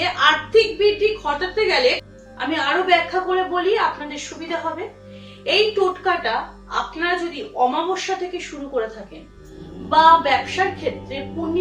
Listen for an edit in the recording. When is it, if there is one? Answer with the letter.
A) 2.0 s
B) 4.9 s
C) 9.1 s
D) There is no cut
A